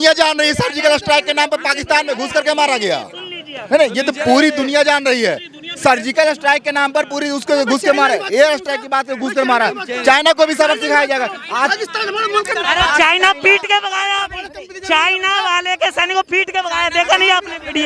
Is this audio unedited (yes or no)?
yes